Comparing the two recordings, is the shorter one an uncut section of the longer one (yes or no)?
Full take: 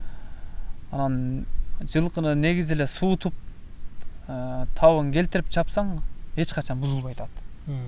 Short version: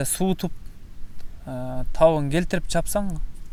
yes